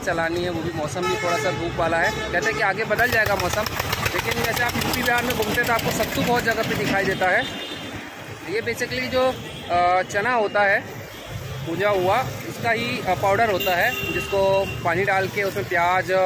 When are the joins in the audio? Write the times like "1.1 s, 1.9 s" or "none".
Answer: none

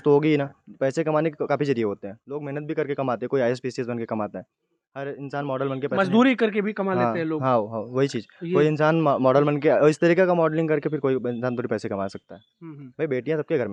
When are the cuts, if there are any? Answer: none

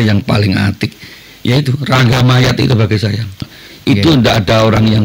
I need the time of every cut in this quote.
3.6 s

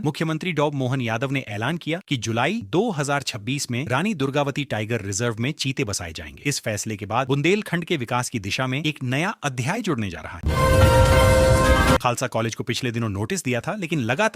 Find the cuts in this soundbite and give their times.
10.4 s, 12.0 s

